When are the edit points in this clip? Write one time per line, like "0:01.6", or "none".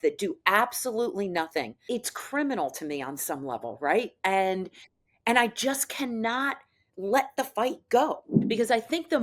0:01.9
0:08.3